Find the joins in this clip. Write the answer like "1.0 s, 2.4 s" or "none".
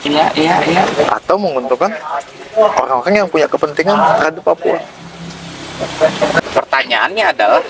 6.4 s